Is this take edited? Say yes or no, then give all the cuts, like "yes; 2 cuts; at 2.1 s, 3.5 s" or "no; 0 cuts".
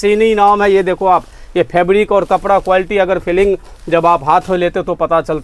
no; 0 cuts